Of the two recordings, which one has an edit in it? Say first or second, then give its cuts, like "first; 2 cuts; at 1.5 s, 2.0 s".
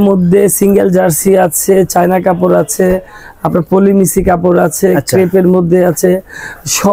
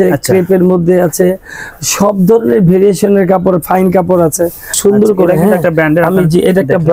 second; 1 cut; at 4.8 s